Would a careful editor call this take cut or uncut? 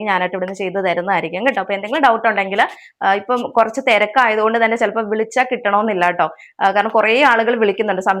uncut